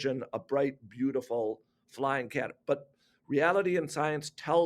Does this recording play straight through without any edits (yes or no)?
yes